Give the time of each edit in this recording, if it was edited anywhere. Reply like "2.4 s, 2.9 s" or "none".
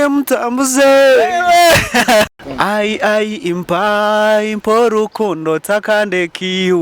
2.4 s